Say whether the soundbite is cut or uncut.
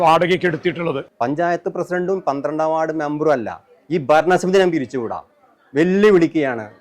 cut